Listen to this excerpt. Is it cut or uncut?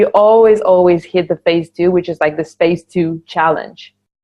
uncut